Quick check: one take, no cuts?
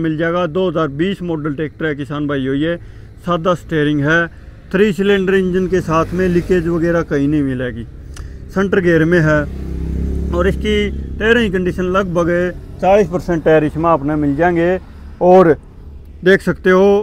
yes; 0 cuts

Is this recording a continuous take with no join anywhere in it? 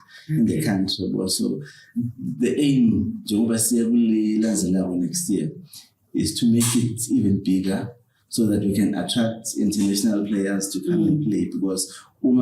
yes; 0 cuts

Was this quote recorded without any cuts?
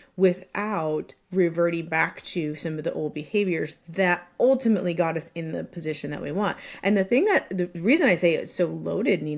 yes; 0 cuts

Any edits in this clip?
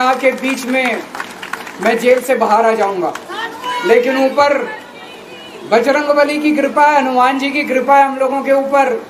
no; 0 cuts

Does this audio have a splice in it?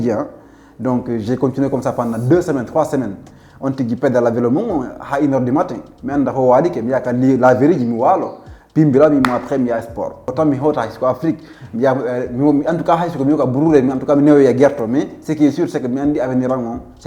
yes; 1 cut; at 10.2 s

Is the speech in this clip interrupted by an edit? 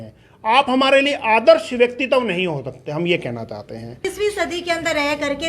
yes; 1 cut; at 4.0 s

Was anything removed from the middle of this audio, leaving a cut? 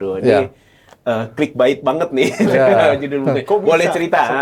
no; 0 cuts

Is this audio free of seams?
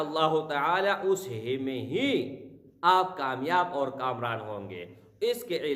yes; 0 cuts

